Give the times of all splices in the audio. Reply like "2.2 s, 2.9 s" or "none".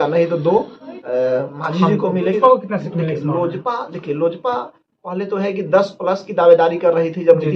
2.3 s